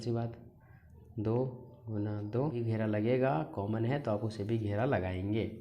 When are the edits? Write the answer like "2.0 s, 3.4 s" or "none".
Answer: 2.6 s